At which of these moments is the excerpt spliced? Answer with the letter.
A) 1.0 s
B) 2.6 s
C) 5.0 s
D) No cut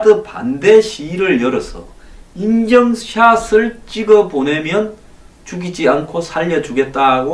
B